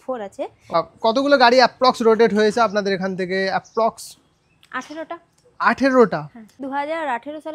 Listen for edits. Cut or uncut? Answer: cut